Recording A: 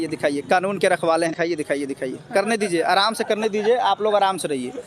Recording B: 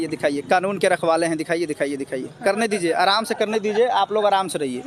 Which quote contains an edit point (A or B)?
A